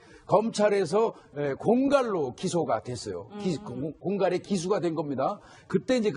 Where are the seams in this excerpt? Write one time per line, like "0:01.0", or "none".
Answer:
0:01.0